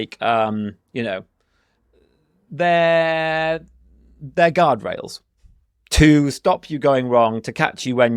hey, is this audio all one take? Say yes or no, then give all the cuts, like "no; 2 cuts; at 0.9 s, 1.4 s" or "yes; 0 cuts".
yes; 0 cuts